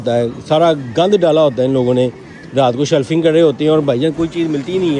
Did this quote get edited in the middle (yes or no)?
no